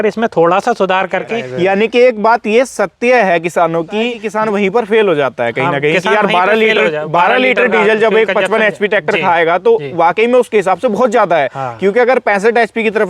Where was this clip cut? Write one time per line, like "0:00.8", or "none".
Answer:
0:01.4
0:04.2